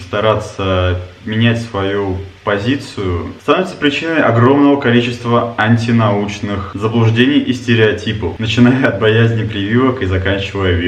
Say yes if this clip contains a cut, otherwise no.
no